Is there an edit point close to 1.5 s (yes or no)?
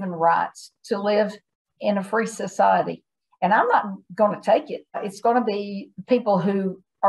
no